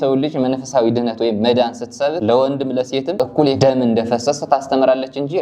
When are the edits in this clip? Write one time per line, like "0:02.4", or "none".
0:02.2
0:03.5